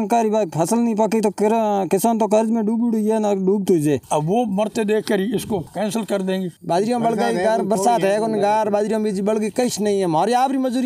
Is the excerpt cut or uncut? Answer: cut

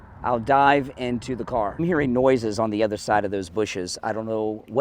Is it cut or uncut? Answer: cut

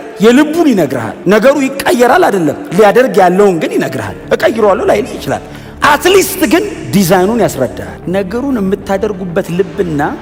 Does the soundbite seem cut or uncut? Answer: uncut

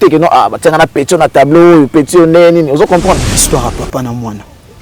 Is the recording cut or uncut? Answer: cut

